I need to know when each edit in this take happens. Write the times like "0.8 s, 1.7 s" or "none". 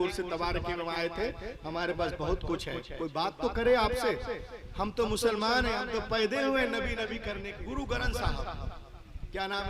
7.4 s